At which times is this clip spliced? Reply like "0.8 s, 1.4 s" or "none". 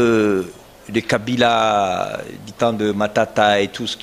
none